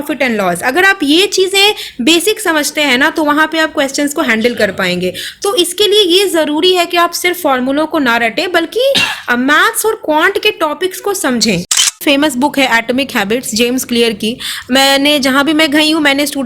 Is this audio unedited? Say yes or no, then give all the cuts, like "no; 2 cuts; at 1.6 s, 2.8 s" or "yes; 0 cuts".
no; 1 cut; at 12.0 s